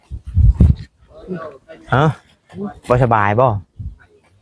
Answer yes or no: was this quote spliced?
no